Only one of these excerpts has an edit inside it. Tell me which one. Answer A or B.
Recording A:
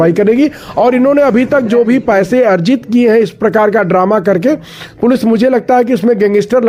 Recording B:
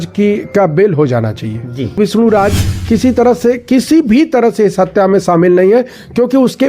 B